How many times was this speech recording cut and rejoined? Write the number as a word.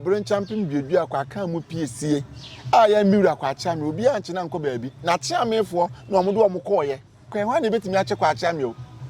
one